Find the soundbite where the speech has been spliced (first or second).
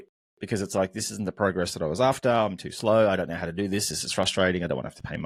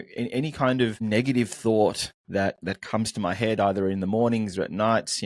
second